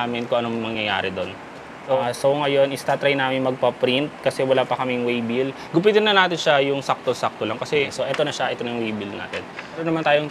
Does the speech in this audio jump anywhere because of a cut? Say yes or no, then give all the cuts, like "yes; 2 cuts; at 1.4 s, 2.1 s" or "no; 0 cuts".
yes; 3 cuts; at 2.0 s, 5.6 s, 7.9 s